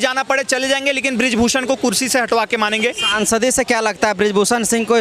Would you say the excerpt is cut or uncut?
uncut